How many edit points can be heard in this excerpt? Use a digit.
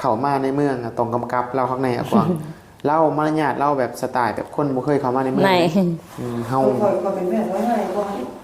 1